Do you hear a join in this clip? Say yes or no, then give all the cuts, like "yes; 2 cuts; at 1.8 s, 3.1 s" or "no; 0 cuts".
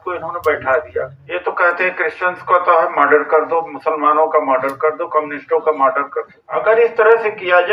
yes; 2 cuts; at 1.2 s, 6.4 s